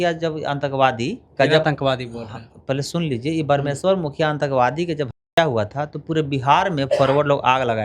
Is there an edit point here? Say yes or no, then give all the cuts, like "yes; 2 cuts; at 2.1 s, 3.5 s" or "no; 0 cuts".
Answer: yes; 1 cut; at 1.2 s